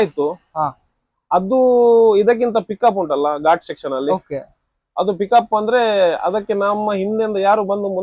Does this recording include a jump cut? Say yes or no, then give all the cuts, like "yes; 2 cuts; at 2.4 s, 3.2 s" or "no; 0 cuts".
no; 0 cuts